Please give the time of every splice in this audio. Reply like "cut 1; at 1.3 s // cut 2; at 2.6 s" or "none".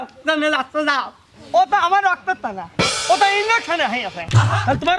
cut 1; at 1.1 s